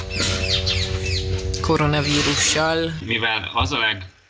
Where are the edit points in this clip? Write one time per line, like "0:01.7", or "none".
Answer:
0:02.9

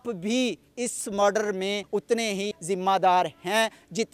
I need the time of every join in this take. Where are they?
0:02.2

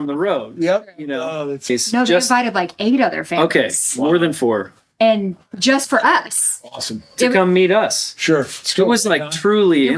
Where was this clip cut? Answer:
0:01.7

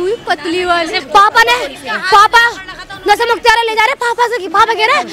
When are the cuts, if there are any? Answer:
0:00.9

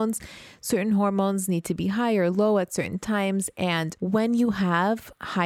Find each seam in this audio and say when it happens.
0:03.9

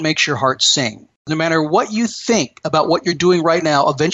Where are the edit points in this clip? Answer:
0:01.2

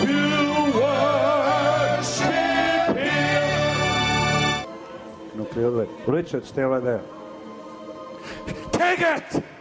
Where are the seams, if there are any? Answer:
0:04.6

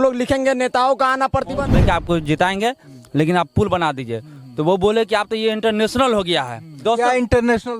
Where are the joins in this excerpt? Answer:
0:01.7
0:06.8

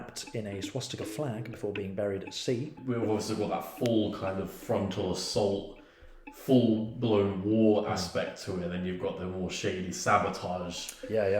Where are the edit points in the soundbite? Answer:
0:02.7

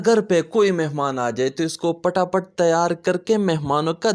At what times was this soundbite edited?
none

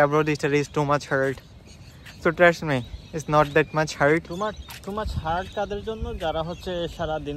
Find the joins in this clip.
none

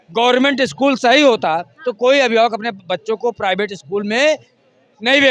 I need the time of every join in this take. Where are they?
none

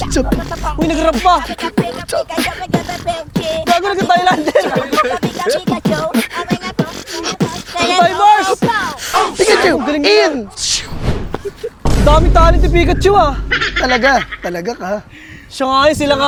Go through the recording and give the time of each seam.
none

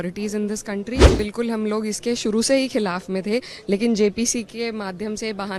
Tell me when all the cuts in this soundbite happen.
0:01.1

